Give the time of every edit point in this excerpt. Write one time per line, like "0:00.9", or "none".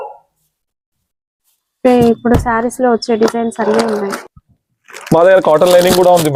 none